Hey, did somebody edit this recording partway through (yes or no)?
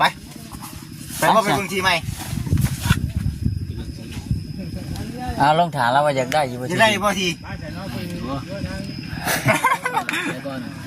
no